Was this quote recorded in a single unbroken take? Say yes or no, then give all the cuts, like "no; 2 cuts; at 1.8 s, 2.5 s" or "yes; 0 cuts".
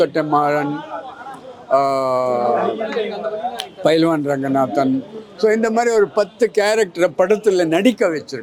yes; 0 cuts